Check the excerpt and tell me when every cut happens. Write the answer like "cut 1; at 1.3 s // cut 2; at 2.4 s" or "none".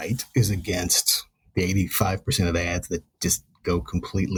none